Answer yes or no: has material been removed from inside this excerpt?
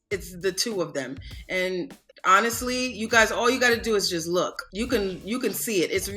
yes